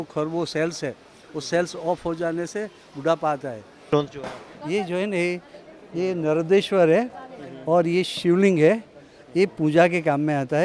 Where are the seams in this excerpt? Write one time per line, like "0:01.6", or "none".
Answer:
0:03.9